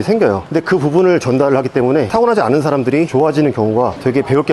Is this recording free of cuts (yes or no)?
yes